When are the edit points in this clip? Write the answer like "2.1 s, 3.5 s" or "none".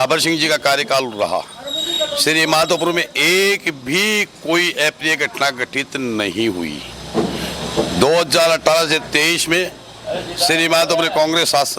none